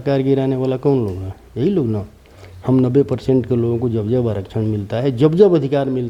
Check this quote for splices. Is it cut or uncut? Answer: uncut